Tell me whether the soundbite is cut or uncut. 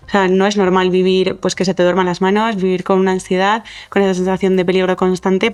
uncut